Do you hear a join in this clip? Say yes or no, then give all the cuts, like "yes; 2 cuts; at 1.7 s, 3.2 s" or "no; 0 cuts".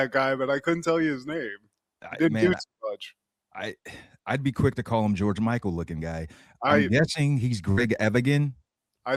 no; 0 cuts